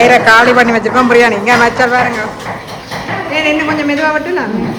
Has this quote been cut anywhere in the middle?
no; 0 cuts

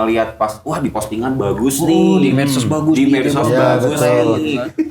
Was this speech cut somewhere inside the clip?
no; 0 cuts

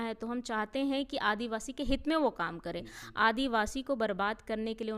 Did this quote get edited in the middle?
no; 0 cuts

